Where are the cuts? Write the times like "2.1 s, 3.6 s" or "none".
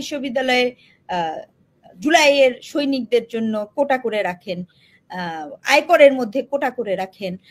none